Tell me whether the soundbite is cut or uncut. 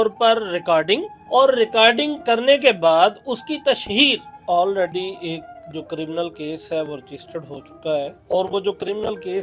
cut